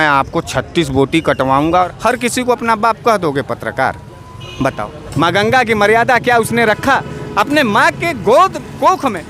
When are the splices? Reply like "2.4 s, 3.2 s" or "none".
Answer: 1.7 s, 5.0 s